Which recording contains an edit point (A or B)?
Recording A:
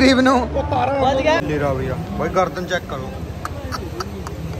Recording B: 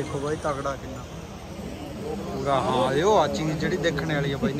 A